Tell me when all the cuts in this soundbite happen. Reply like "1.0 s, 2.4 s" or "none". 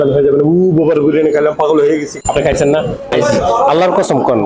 2.2 s, 3.1 s